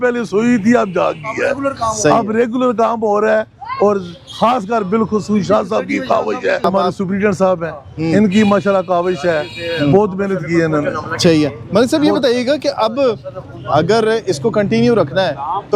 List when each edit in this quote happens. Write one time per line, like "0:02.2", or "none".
none

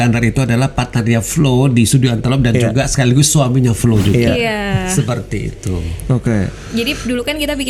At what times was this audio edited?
none

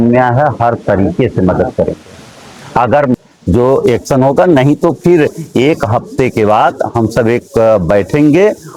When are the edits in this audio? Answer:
0:03.1

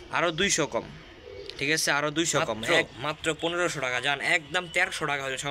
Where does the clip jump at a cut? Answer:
0:02.6

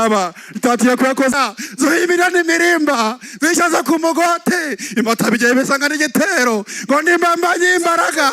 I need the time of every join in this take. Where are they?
0:01.3

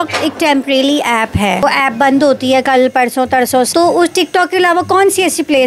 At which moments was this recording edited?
0:01.6
0:03.7

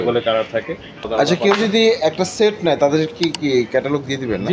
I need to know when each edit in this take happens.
0:01.1

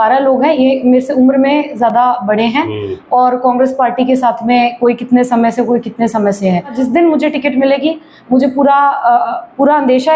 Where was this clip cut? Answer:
0:06.7

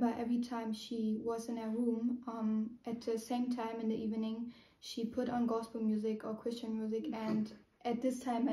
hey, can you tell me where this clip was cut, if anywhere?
none

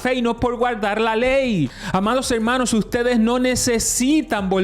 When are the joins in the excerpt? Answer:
0:01.8

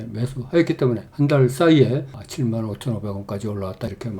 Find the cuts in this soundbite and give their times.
0:02.2

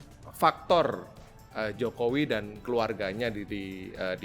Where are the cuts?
none

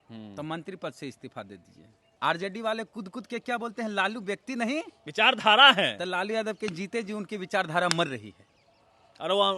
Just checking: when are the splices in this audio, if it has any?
0:02.1

